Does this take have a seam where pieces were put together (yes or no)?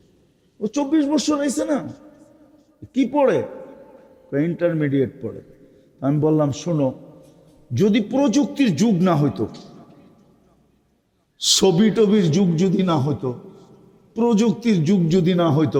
no